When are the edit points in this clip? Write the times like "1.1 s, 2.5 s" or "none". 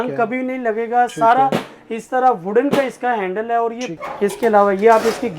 3.9 s